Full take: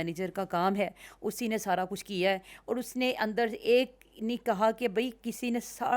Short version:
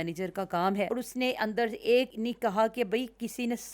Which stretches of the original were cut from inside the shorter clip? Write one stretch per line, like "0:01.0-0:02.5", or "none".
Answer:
0:00.9-0:02.7
0:03.9-0:04.2